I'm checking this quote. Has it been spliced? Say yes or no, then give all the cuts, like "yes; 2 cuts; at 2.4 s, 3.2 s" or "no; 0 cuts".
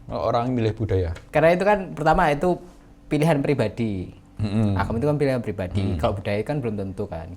yes; 1 cut; at 1.2 s